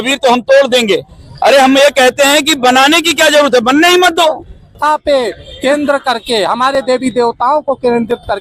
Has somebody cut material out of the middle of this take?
yes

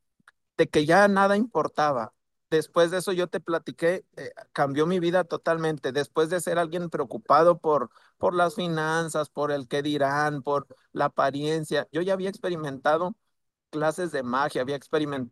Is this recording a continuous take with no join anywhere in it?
yes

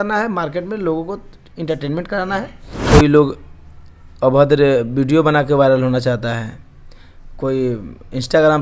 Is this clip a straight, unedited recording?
no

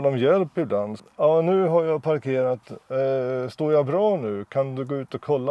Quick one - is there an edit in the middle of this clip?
yes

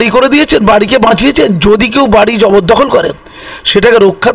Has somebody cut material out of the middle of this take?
no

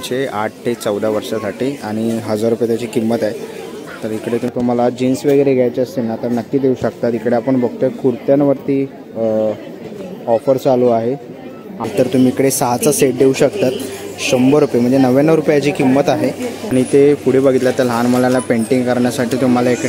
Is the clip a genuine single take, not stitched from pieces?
no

